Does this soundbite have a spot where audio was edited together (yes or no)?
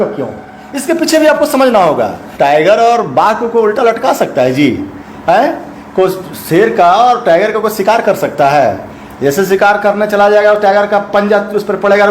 yes